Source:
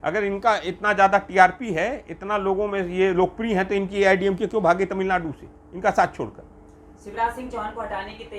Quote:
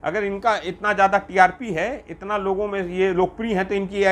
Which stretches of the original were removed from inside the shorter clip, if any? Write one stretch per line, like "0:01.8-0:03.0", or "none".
none

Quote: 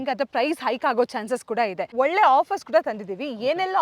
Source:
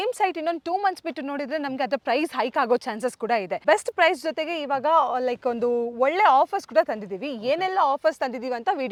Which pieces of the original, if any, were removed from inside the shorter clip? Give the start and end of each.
0:03.6-0:05.9

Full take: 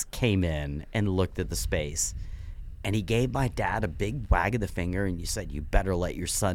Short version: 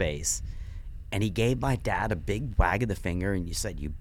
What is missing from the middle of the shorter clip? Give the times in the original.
none

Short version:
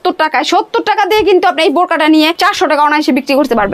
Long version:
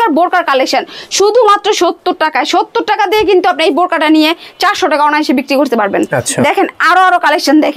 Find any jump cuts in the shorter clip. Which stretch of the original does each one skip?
0:04.4-0:04.6

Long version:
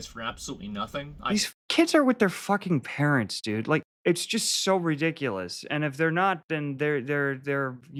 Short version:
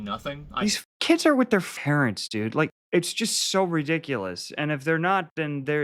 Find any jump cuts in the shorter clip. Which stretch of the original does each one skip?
0:02.4-0:02.8

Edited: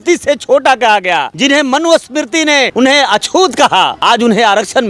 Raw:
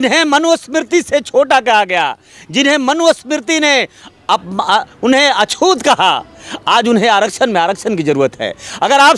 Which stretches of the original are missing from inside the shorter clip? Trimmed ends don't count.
0:02.2-0:02.5
0:03.9-0:05.0
0:06.2-0:06.6

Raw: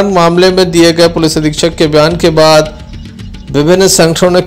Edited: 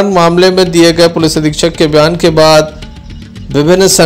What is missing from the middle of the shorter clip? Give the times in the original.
none

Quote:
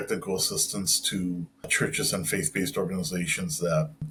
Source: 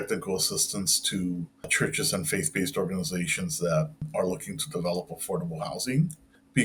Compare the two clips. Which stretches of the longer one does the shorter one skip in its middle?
none

